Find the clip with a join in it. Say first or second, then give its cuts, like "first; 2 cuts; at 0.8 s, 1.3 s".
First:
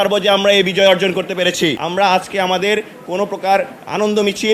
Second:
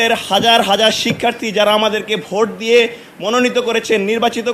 first; 1 cut; at 1.8 s